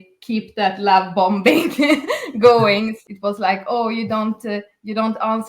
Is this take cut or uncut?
cut